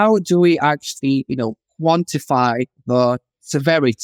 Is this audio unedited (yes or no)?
yes